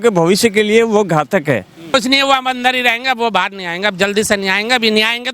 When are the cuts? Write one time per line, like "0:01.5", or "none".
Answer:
0:01.8